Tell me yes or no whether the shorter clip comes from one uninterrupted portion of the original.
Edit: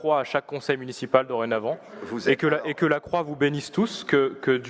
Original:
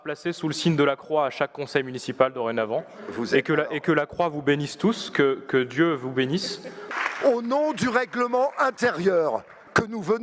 yes